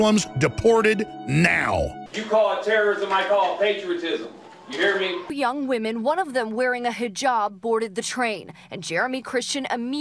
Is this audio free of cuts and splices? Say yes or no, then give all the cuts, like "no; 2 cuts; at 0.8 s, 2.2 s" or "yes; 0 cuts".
no; 2 cuts; at 2.1 s, 5.2 s